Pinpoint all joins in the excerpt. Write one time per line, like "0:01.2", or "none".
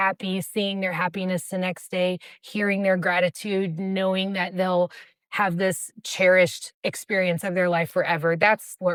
none